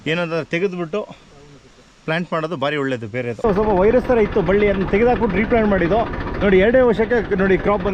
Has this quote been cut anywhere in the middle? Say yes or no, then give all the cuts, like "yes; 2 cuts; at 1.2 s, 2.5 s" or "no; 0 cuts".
yes; 1 cut; at 3.4 s